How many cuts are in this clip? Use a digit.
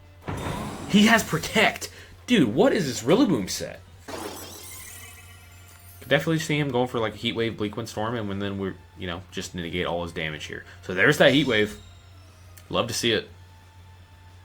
1